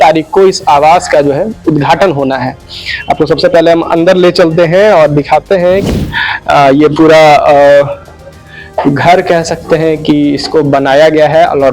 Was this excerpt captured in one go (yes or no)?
no